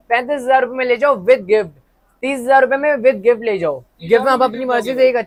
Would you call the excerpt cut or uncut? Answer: uncut